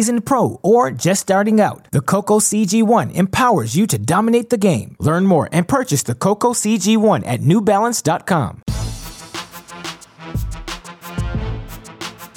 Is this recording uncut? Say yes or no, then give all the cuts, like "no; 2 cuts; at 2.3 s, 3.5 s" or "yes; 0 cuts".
no; 1 cut; at 8.6 s